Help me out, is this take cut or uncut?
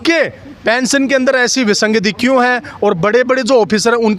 uncut